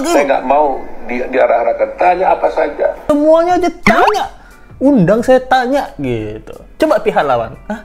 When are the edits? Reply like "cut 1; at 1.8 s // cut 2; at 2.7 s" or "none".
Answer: cut 1; at 3.0 s